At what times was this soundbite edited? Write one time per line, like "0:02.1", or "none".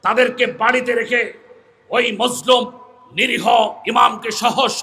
none